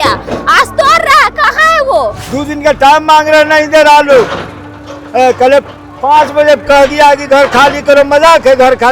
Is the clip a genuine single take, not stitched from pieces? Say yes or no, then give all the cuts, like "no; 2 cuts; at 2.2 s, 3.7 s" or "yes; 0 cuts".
no; 1 cut; at 2.2 s